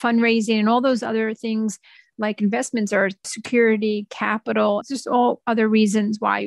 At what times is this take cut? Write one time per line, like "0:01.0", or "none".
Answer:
0:03.2
0:04.8